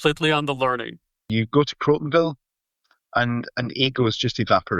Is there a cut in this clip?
yes; 1 cut; at 1.3 s

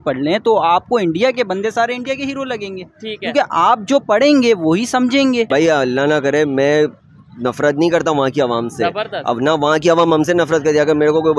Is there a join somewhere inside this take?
yes; 1 cut; at 5.5 s

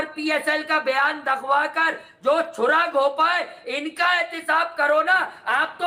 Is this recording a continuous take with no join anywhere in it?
yes; 0 cuts

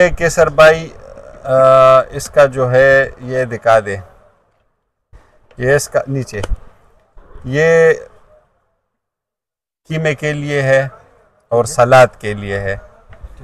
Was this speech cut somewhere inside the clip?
no; 0 cuts

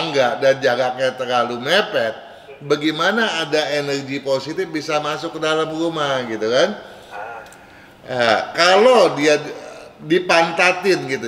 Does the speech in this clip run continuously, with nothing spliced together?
yes; 0 cuts

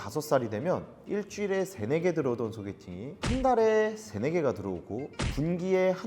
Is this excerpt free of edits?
no; 1 cut; at 3.1 s

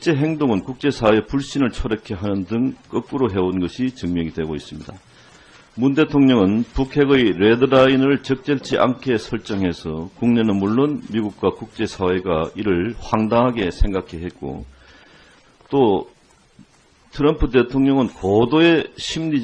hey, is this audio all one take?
no; 1 cut; at 15.5 s

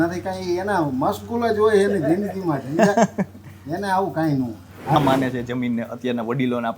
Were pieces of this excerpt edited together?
yes; 1 cut; at 5.0 s

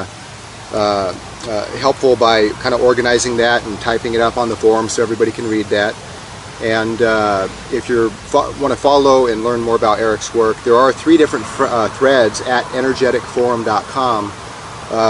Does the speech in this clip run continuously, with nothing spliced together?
yes; 0 cuts

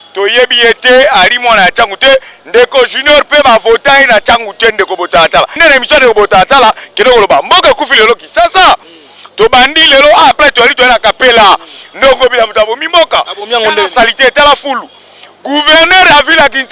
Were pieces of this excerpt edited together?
yes; 1 cut; at 5.6 s

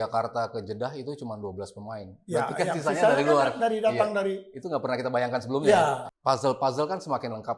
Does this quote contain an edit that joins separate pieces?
yes; 1 cut; at 6.1 s

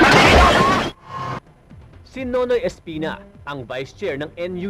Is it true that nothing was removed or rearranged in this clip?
no; 1 cut; at 0.9 s

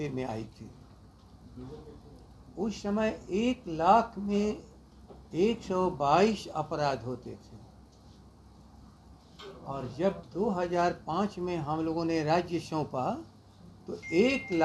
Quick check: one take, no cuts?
yes; 0 cuts

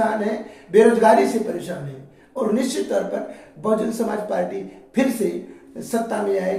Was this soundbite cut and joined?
no; 0 cuts

